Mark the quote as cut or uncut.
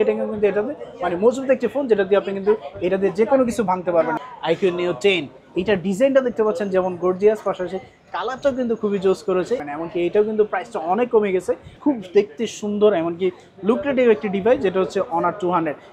cut